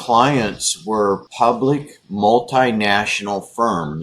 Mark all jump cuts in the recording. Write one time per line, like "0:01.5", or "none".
0:01.3